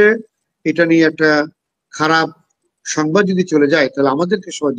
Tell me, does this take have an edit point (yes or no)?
no